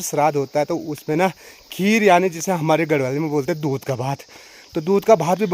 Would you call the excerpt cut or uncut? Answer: uncut